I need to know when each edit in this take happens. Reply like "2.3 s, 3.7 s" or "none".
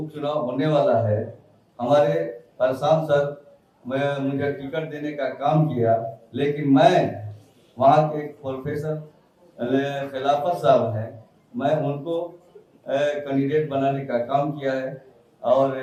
none